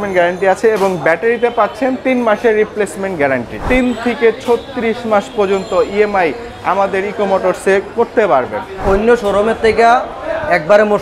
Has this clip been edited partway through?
yes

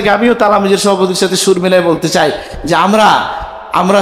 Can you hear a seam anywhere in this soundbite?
no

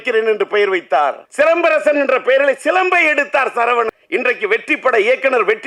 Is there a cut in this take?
yes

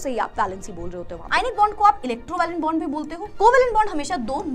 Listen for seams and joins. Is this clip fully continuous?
no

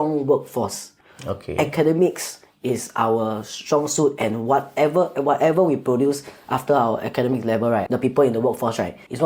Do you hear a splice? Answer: no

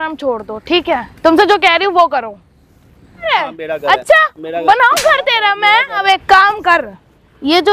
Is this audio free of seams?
no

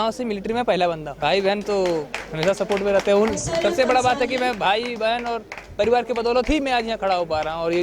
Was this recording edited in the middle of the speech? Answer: yes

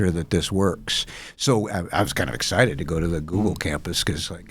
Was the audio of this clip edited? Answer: no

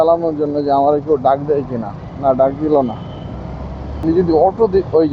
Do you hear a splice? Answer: yes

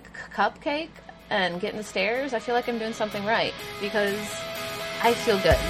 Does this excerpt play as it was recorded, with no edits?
yes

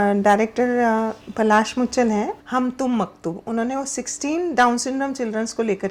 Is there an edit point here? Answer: yes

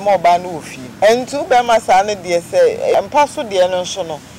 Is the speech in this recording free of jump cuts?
no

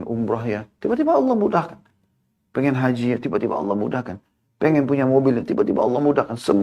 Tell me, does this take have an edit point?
no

